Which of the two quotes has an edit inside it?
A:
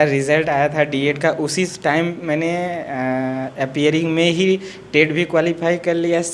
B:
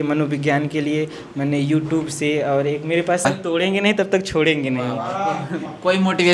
B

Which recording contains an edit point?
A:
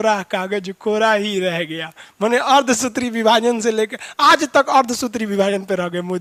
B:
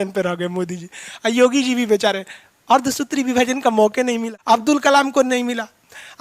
B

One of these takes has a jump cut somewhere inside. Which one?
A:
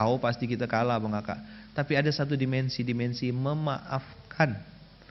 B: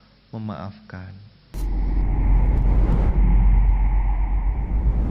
B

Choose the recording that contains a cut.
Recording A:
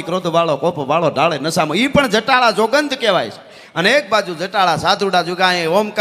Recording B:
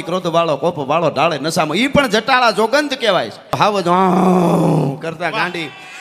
B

